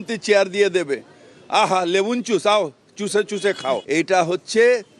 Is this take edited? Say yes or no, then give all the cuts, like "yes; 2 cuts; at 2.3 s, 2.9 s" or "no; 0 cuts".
yes; 1 cut; at 3.8 s